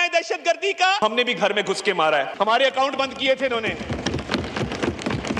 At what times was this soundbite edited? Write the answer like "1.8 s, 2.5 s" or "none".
1.0 s, 2.3 s